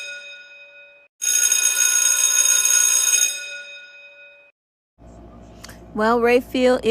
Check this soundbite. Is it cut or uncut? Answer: cut